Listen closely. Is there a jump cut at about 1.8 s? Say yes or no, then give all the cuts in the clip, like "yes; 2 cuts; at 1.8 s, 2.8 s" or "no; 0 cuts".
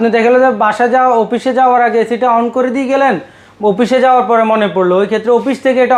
no; 0 cuts